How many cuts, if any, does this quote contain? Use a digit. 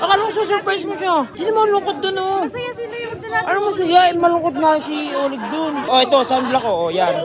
2